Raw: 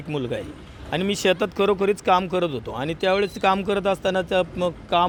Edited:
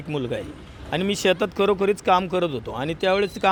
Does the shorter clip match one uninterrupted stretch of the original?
yes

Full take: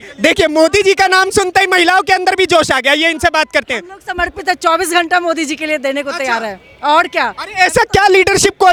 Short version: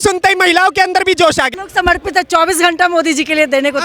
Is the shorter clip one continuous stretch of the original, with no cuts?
no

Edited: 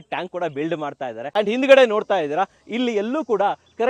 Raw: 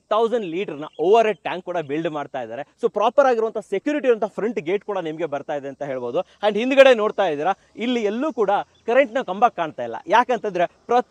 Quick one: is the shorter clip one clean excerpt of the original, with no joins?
no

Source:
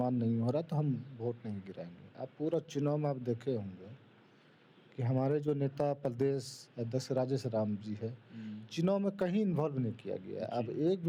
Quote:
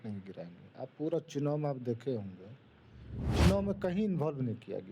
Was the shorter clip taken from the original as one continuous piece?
no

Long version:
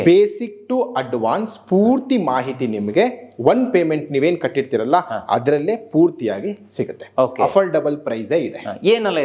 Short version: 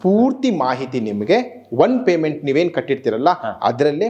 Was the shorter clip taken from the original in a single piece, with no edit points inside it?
yes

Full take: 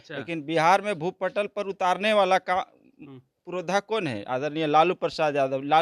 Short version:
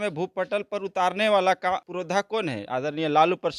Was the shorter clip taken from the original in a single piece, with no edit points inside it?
no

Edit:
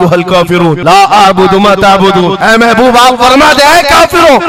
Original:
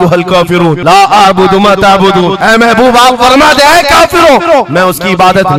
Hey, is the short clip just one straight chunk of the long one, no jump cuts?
yes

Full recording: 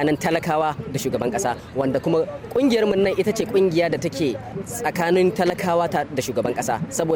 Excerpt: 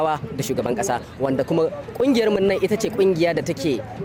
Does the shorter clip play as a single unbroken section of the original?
yes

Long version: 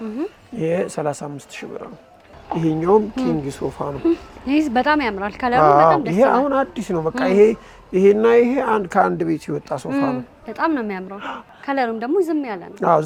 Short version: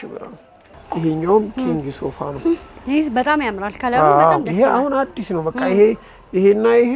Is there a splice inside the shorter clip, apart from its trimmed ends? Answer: no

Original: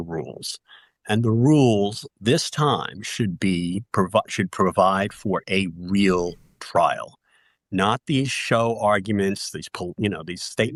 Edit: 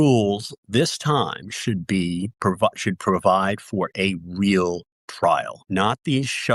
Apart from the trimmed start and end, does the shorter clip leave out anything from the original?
yes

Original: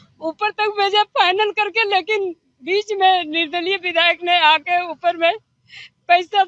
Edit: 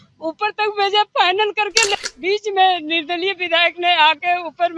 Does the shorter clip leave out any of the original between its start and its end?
yes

